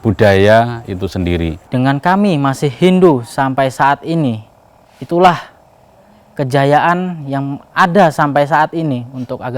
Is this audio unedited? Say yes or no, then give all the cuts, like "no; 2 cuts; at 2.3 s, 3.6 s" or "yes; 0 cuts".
no; 1 cut; at 1.6 s